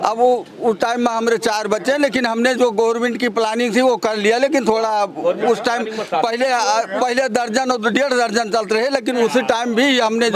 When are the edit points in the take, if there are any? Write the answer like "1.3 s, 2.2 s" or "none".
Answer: none